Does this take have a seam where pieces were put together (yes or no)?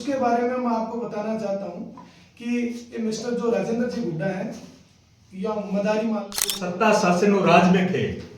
yes